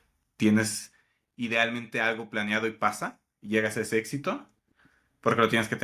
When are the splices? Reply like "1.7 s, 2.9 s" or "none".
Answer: none